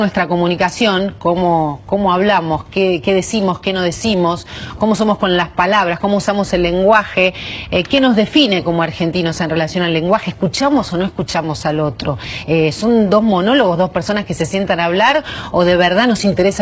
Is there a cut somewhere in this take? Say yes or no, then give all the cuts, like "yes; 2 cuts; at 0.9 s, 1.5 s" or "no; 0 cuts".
yes; 1 cut; at 15.1 s